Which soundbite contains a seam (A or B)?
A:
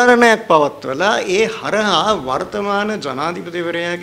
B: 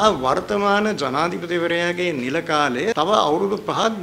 B